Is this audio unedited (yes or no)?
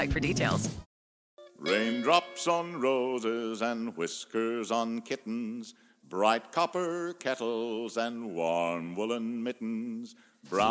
no